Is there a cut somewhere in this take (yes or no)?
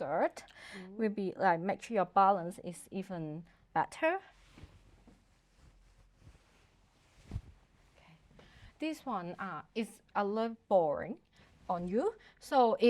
yes